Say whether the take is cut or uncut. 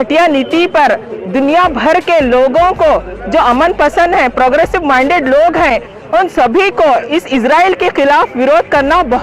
uncut